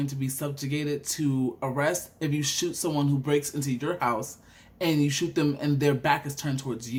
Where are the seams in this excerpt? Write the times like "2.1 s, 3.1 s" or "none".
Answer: none